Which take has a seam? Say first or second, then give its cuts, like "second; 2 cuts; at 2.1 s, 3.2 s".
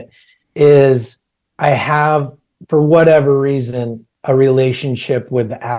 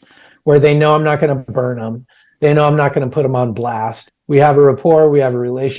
second; 1 cut; at 4.0 s